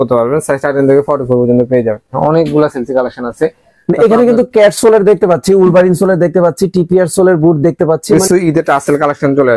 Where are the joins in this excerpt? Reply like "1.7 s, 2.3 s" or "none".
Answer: 2.1 s, 8.2 s